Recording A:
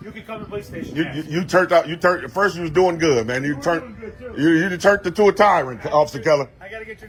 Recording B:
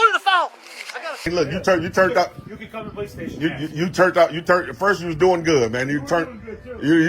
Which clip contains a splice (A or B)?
B